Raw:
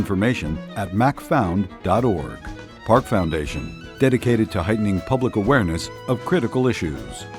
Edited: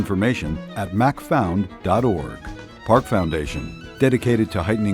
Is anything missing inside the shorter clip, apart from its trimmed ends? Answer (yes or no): no